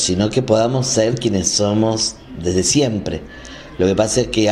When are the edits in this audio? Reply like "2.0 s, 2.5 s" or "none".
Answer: none